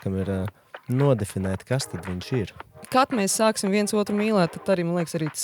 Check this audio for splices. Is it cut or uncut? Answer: cut